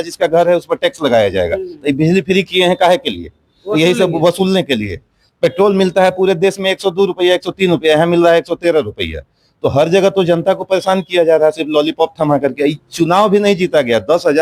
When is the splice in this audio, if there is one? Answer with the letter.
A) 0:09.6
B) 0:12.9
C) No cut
C